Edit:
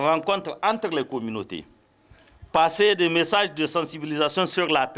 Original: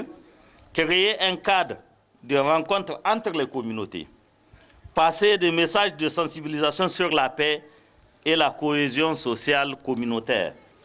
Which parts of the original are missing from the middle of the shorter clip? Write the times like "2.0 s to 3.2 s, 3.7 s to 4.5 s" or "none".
none